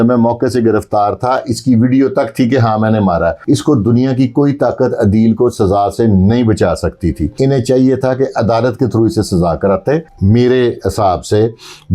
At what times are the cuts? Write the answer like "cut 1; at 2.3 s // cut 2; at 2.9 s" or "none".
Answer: cut 1; at 3.4 s // cut 2; at 7.3 s // cut 3; at 10.1 s